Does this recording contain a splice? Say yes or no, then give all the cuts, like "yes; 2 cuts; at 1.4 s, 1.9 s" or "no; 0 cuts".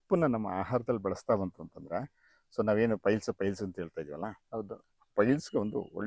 no; 0 cuts